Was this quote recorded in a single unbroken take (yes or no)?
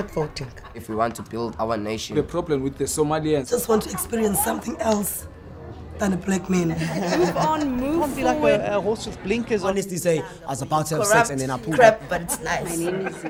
yes